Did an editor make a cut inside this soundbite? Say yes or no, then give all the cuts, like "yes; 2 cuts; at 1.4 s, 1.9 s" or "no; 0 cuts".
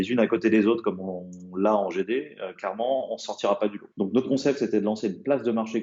yes; 1 cut; at 3.8 s